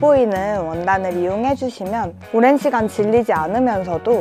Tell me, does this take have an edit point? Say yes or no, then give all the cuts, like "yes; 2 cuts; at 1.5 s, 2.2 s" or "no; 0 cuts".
yes; 1 cut; at 2.2 s